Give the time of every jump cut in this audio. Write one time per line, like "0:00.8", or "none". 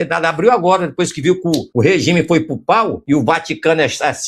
0:01.7
0:03.0